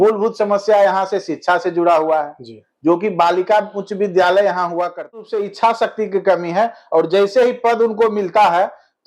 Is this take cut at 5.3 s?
yes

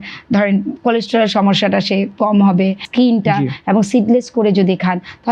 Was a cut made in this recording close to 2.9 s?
yes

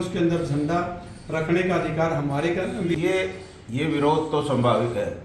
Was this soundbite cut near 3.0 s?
yes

